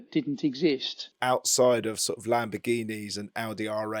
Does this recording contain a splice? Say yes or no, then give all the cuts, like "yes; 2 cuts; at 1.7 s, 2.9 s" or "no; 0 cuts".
yes; 1 cut; at 1.1 s